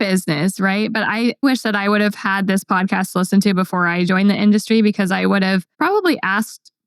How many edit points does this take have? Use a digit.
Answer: 2